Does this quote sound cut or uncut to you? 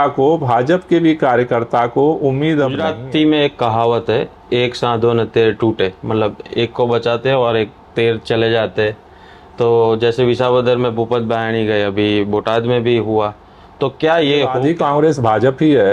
cut